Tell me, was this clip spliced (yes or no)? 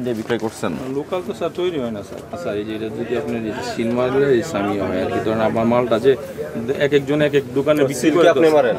no